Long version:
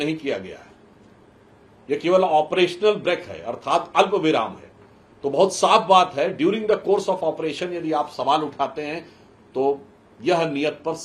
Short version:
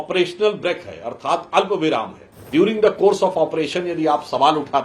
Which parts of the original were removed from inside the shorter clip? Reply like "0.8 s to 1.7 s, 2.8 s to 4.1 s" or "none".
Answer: 4.9 s to 6.3 s